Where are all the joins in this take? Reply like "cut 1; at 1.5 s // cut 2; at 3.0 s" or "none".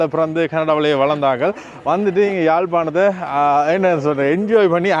none